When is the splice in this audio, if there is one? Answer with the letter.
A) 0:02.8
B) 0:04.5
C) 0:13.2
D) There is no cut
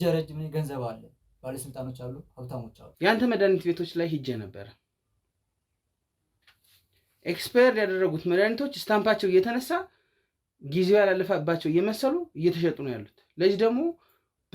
A